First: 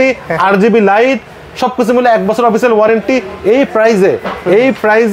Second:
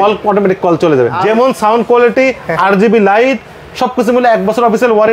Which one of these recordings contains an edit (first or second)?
second